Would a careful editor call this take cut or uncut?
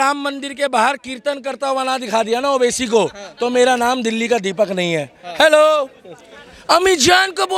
uncut